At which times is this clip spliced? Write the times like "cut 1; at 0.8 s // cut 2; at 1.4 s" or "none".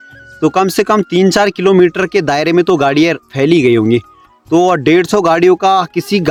none